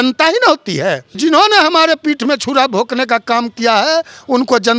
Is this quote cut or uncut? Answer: cut